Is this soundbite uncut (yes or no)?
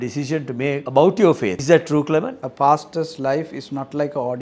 no